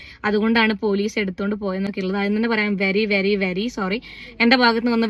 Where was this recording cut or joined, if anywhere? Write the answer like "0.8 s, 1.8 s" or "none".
none